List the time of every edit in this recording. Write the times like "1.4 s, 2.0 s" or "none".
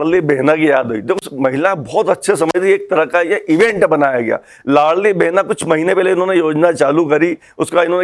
none